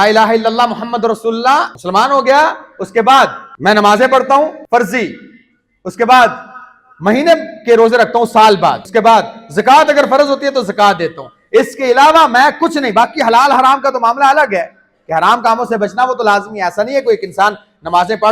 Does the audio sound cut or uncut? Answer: cut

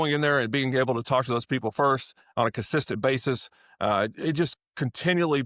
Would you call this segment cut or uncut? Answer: uncut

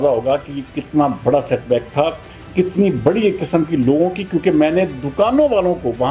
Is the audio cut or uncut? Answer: uncut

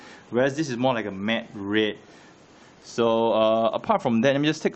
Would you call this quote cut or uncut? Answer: uncut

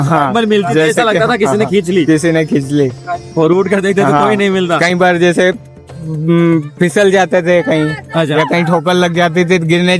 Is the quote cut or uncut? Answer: uncut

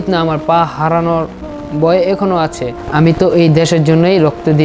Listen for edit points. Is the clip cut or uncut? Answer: cut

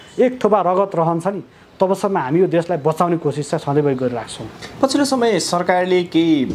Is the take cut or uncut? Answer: uncut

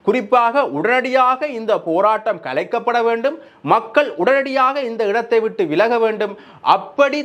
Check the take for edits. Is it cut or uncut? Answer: uncut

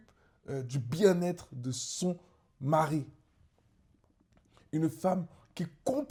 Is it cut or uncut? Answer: uncut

